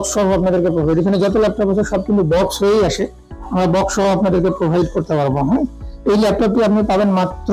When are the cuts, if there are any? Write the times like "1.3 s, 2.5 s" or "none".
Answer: none